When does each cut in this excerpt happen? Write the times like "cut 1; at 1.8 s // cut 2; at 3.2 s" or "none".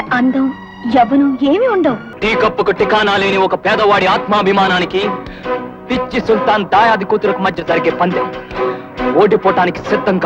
cut 1; at 2.1 s